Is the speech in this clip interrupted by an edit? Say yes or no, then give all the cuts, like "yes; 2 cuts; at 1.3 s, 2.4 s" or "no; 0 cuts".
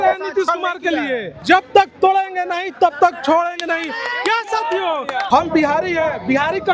yes; 2 cuts; at 1.3 s, 5.2 s